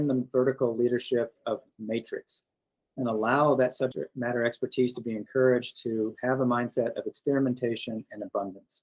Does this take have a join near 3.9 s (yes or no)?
yes